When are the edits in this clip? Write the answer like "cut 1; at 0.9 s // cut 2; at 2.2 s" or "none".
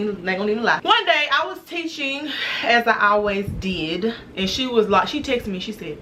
cut 1; at 0.8 s // cut 2; at 2.5 s // cut 3; at 4.3 s